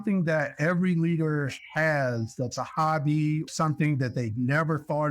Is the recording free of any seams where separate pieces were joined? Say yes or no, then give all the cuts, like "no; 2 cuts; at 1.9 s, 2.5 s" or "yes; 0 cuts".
no; 1 cut; at 3.5 s